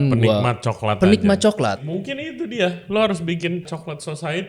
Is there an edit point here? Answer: yes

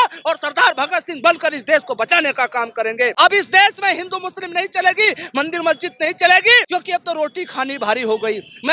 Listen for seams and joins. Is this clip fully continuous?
no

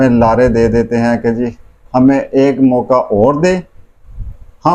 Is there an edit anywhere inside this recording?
no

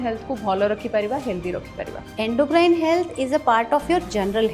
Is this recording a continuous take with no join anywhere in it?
no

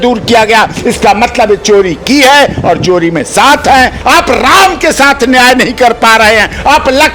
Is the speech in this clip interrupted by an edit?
yes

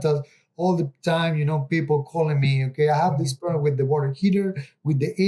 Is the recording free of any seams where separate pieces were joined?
yes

